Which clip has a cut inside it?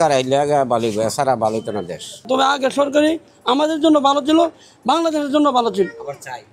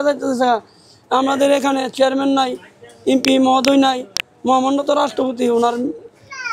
first; 1 cut; at 2.2 s

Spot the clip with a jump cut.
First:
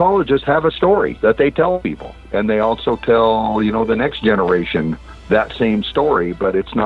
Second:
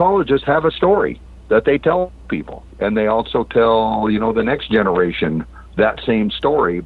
first; 2 cuts; at 1.1 s, 1.9 s

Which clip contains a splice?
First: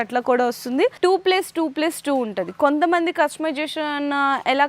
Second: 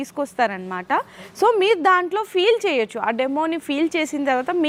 first; 1 cut; at 0.9 s

